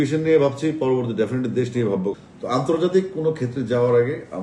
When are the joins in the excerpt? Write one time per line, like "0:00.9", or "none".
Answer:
0:02.1